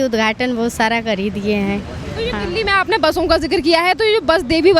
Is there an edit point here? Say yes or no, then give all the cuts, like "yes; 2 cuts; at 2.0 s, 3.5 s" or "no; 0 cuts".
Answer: no; 0 cuts